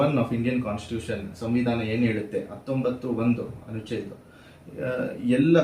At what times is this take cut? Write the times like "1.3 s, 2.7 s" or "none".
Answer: none